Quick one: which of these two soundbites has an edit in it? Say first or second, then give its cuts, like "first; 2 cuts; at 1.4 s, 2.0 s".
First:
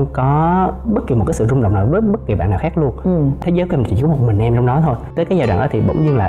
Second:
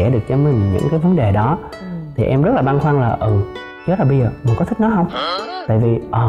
first; 2 cuts; at 3.4 s, 5.0 s